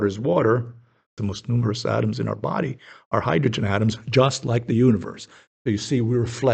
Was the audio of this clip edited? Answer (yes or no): yes